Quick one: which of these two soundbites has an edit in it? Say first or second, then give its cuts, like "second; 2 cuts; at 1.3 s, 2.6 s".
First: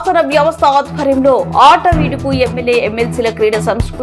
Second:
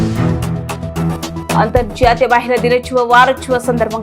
second; 1 cut; at 1.4 s